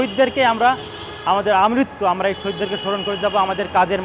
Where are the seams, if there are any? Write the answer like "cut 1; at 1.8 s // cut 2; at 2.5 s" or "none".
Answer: none